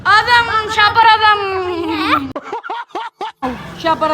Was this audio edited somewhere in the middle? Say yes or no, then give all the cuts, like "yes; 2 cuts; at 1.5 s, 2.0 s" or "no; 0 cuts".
yes; 2 cuts; at 2.3 s, 3.4 s